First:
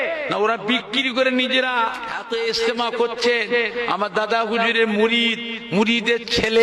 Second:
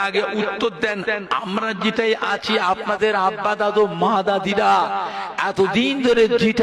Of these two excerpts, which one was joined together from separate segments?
first; 1 cut; at 2.1 s

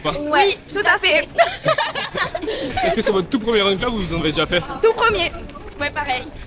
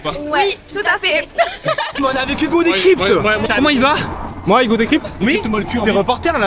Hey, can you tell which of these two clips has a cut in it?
second; 2 cuts; at 2.0 s, 3.4 s

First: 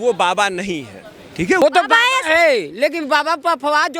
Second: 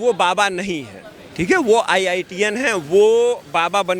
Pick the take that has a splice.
first; 1 cut; at 1.6 s

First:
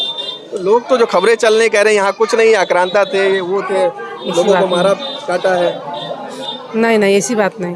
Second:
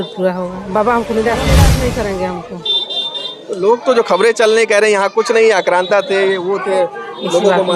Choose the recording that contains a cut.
second; 1 cut; at 1.6 s

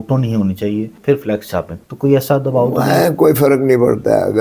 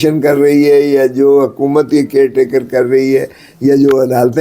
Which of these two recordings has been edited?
first; 2 cuts; at 0.9 s, 1.8 s

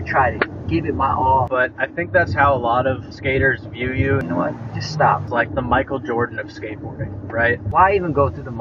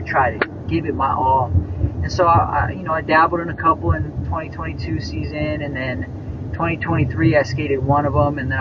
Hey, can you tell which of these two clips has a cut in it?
first; 4 cuts; at 1.5 s, 4.2 s, 5.3 s, 7.6 s

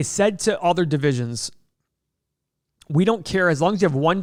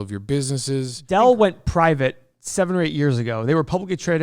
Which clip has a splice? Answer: second; 1 cut; at 0.9 s

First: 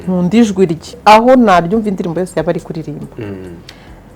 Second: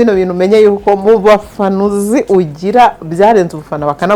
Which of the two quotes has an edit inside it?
first; 1 cut; at 1.0 s

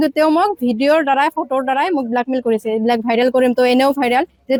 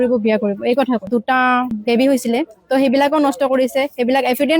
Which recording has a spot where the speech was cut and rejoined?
second; 1 cut; at 1.1 s

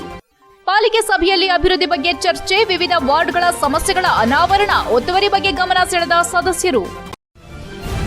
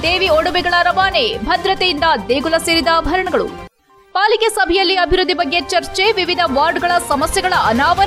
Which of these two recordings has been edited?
first; 1 cut; at 7.1 s

